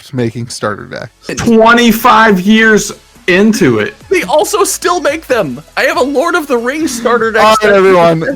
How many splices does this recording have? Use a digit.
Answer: 1